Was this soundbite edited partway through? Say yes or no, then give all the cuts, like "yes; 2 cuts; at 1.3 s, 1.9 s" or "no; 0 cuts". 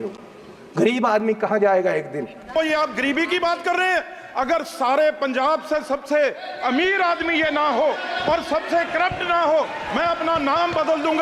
yes; 1 cut; at 2.6 s